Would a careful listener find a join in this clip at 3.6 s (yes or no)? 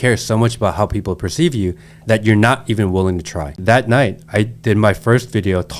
yes